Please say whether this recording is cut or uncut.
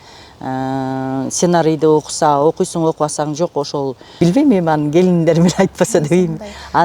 cut